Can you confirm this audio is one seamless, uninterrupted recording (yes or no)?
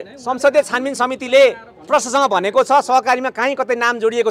yes